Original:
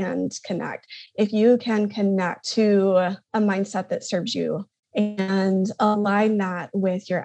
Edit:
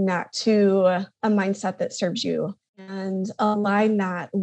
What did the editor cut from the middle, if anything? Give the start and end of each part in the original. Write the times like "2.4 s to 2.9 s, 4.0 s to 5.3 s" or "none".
4.9 s to 5.2 s